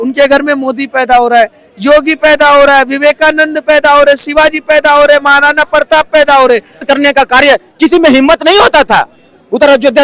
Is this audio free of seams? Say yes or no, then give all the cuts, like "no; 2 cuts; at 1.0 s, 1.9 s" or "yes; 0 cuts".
no; 1 cut; at 6.8 s